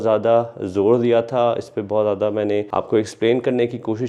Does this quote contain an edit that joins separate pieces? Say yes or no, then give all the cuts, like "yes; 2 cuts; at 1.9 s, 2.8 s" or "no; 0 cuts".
no; 0 cuts